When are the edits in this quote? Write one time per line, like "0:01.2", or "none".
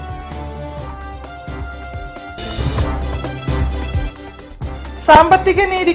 0:04.5

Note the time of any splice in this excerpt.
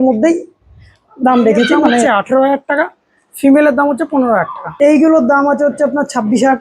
0:02.0
0:04.6

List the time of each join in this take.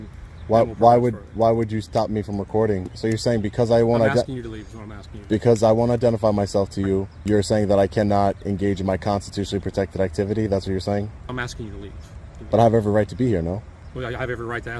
0:02.9
0:07.1
0:11.3
0:12.4
0:13.8

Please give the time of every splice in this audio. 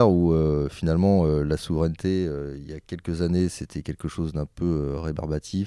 none

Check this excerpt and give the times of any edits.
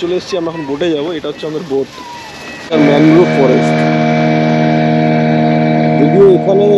0:02.6

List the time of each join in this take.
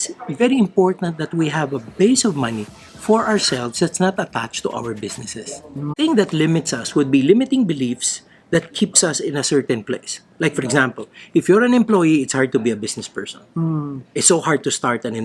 0:05.9

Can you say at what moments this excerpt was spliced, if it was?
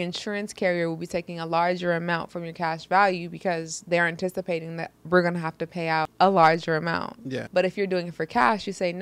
0:06.1
0:07.3

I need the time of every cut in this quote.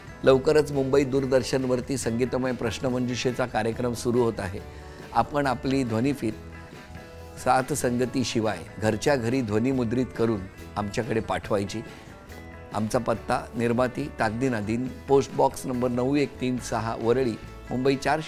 none

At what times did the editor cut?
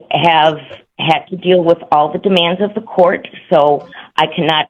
none

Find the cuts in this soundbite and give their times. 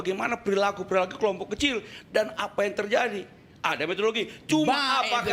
none

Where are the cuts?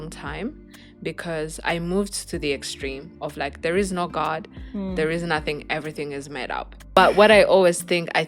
0:06.7

